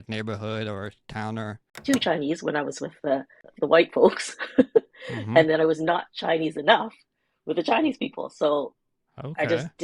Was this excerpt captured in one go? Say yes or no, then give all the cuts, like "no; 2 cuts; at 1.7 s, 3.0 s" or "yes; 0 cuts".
no; 1 cut; at 1.7 s